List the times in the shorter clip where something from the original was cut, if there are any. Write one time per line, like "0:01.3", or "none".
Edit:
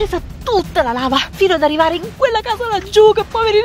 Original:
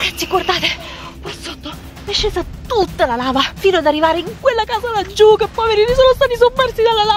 none